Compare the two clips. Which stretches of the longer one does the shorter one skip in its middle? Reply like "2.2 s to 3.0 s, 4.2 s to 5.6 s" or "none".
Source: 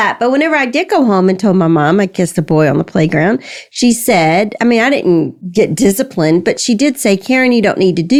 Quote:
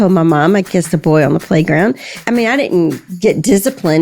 3.6 s to 4.5 s

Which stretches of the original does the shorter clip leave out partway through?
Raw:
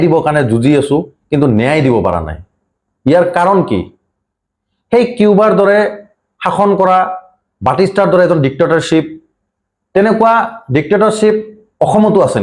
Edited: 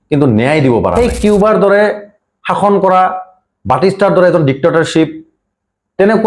2.1 s to 4.9 s

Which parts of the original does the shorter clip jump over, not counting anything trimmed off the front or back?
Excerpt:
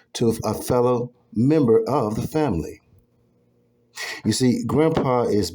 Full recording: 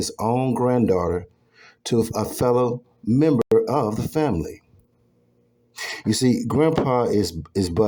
3.4 s to 3.5 s

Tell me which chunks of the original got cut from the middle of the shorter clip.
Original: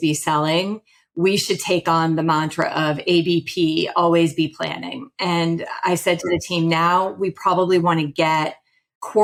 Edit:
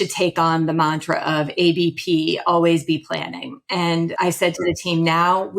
5.6 s to 5.8 s

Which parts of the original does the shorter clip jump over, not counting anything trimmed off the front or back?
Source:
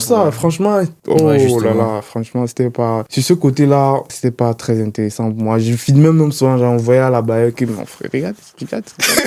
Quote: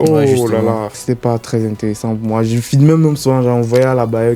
2.1 s to 4.1 s

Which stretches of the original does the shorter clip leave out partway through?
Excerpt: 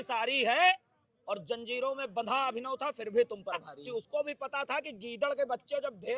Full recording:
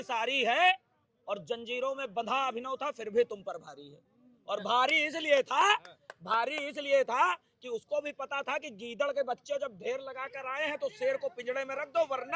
3.7 s to 7.5 s

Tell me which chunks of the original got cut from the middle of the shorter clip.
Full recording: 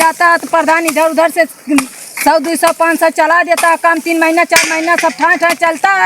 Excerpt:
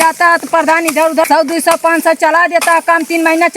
1.2 s to 2.2 s

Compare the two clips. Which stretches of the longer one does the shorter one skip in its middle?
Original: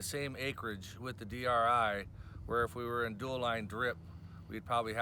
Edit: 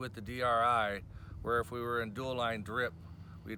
none

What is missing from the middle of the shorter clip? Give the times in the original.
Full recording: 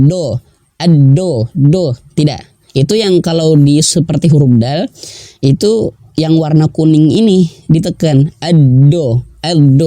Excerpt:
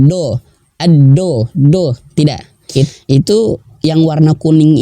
2.9 s to 5.2 s

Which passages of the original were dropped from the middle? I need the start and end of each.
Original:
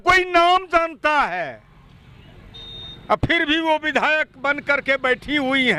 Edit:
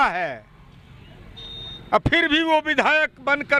none

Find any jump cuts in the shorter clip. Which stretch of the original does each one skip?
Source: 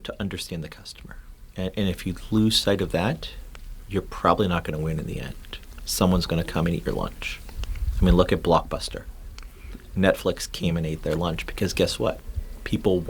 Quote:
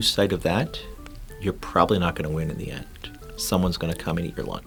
none

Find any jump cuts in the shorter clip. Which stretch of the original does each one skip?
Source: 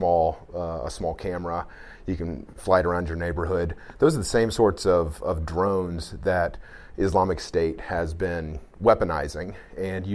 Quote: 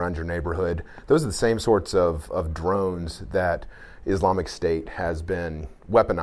none

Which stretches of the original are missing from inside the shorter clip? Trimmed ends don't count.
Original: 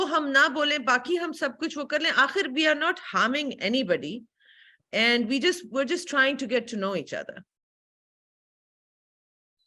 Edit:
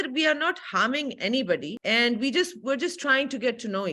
4.1 s to 4.8 s

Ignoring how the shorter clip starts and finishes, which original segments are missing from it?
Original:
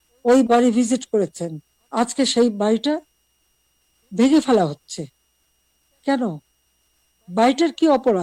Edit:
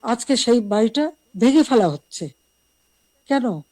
3.1 s to 4.0 s

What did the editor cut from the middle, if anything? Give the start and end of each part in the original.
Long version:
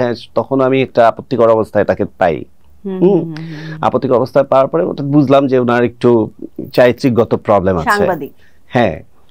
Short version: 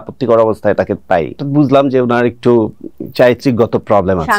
2.5 s to 5.0 s

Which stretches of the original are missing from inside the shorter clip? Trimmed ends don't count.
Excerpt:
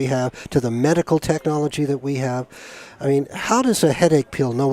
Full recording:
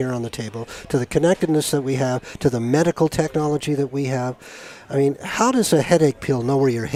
none

